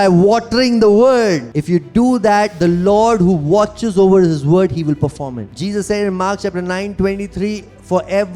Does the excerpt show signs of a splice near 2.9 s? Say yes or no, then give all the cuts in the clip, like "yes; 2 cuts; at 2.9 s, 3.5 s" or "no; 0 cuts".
no; 2 cuts; at 1.4 s, 5.5 s